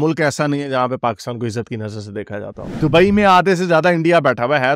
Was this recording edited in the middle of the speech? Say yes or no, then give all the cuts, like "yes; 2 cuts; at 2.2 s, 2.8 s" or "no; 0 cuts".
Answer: yes; 1 cut; at 2.6 s